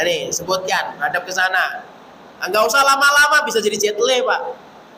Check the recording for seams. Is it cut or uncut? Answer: uncut